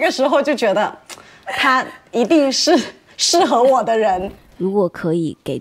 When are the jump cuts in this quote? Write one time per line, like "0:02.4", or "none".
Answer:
0:04.3